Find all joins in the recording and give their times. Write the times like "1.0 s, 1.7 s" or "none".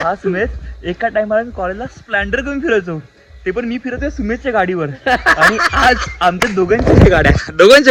none